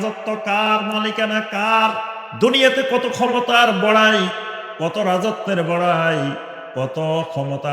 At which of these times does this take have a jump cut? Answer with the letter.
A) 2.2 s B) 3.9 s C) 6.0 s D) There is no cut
A